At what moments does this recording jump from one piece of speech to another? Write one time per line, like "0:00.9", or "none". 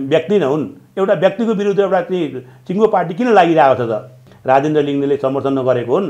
0:04.3